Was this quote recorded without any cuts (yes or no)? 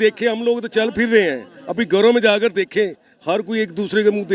yes